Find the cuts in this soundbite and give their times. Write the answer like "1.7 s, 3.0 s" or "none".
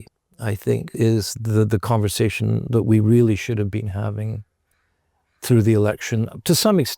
0.9 s